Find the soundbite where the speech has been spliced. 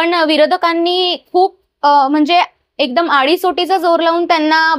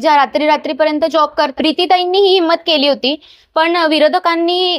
second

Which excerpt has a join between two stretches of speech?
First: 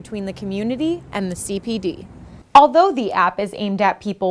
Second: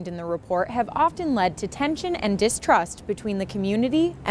first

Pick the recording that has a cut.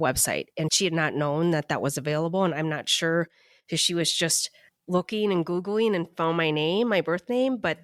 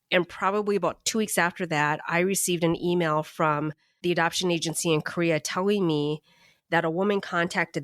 second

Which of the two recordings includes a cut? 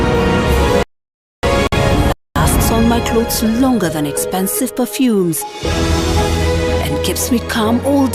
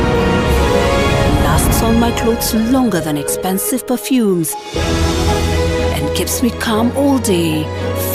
second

